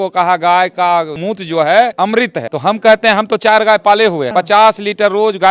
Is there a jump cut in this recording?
yes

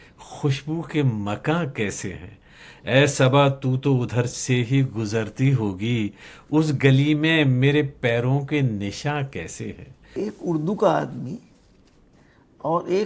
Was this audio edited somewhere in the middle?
yes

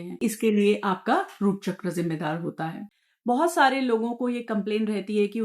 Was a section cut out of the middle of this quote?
yes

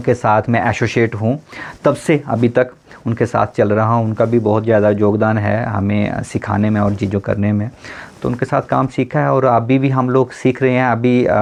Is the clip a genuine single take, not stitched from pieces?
yes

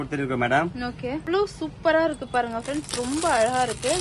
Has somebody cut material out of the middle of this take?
yes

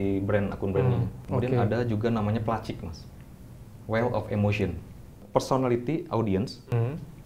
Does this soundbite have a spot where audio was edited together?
yes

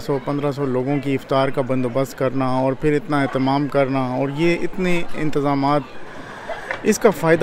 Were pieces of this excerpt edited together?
no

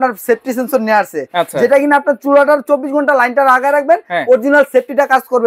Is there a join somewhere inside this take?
no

